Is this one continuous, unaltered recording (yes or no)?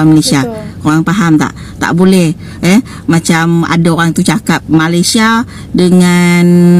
yes